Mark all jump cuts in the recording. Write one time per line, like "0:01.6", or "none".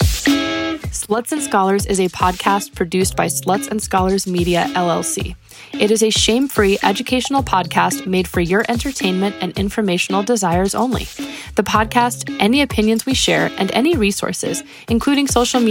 0:00.9